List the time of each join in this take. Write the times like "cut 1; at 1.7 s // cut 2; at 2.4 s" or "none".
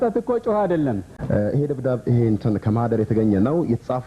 cut 1; at 1.1 s